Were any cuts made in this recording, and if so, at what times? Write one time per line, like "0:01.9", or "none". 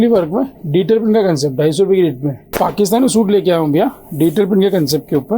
0:02.4